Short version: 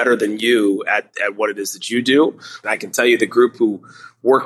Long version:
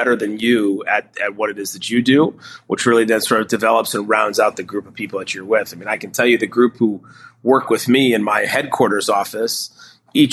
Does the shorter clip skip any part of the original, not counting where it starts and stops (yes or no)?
yes